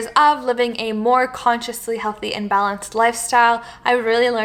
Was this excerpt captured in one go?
yes; 0 cuts

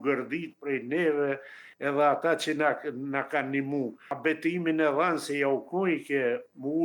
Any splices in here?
yes; 1 cut; at 4.2 s

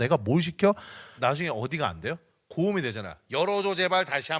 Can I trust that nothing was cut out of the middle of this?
no; 1 cut; at 1.1 s

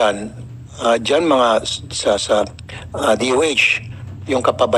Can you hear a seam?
no; 0 cuts

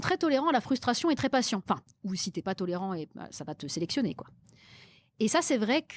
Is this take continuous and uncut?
yes; 0 cuts

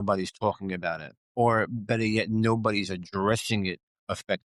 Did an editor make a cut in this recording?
yes; 1 cut; at 1.1 s

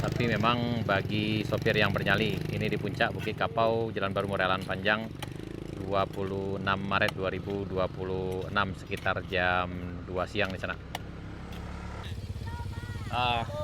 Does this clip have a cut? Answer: yes; 1 cut; at 12.1 s

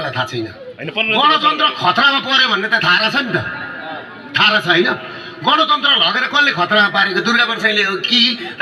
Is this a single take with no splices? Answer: yes; 0 cuts

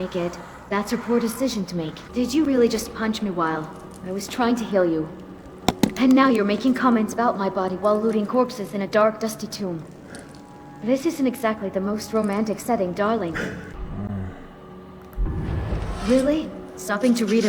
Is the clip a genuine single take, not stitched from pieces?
no; 2 cuts; at 2.5 s, 14.1 s

